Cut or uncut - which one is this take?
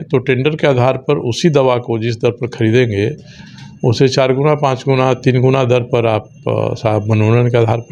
uncut